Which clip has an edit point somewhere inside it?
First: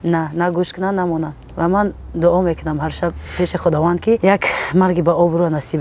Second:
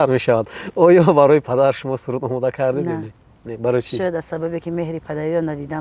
first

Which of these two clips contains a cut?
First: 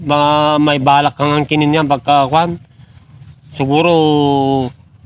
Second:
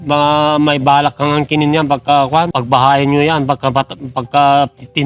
second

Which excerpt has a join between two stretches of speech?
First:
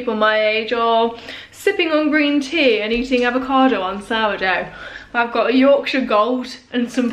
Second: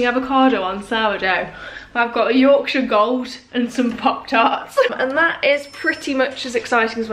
second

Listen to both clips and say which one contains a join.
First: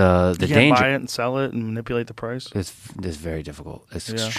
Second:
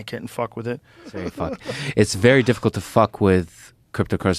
second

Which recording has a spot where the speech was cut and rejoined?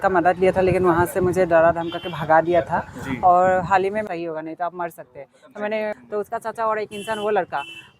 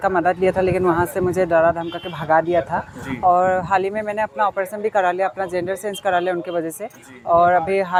first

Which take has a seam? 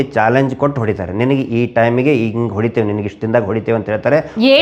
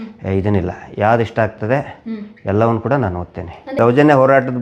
second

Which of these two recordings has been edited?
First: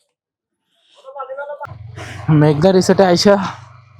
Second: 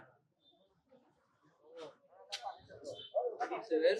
first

